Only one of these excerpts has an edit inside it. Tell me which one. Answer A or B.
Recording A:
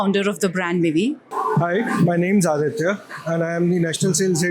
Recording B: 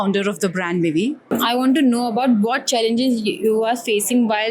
A